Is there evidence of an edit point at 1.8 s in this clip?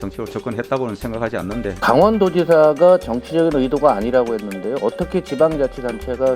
yes; 1 cut; at 1.8 s

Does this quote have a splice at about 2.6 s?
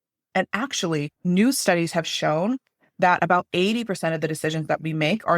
no; 1 cut; at 1.2 s

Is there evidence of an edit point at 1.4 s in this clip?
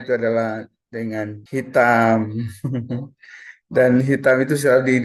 yes; 1 cut; at 1.4 s

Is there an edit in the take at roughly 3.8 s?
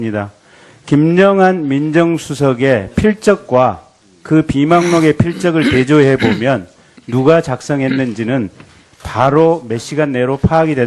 no; 1 cut; at 6.3 s

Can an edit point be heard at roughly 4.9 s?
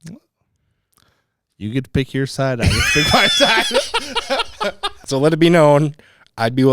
yes; 1 cut; at 4.9 s

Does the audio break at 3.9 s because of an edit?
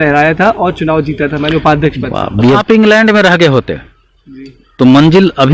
no; 1 cut; at 2.6 s

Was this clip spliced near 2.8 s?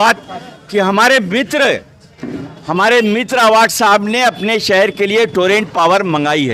no; 0 cuts

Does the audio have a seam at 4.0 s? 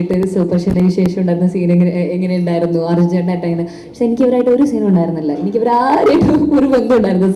no; 0 cuts

